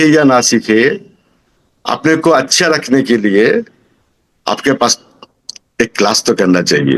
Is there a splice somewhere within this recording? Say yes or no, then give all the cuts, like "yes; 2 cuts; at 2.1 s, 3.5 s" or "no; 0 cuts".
no; 0 cuts